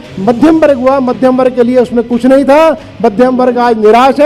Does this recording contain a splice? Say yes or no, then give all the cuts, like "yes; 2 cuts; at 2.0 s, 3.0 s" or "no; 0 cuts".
no; 0 cuts